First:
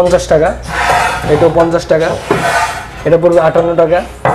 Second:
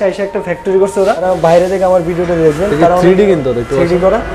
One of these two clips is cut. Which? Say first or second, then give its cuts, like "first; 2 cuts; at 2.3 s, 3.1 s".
second; 1 cut; at 1.2 s